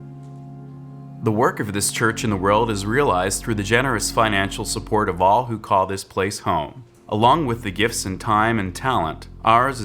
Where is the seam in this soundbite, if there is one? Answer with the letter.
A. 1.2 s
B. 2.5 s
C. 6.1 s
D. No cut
A